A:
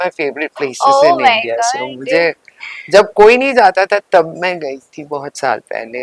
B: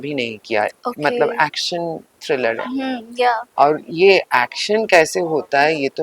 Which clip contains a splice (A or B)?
B